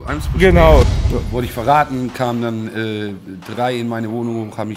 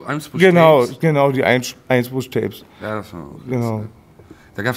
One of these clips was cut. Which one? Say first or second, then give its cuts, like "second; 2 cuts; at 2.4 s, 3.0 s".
first; 1 cut; at 0.9 s